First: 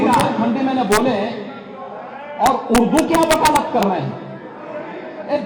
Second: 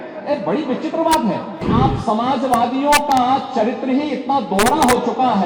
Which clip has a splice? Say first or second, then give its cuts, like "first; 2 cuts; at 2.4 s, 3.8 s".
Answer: second; 1 cut; at 1.6 s